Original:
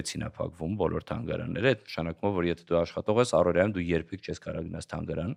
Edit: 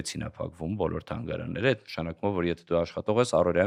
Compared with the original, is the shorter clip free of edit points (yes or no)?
yes